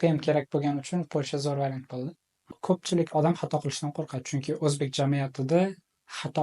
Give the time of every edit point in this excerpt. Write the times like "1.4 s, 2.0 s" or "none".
2.3 s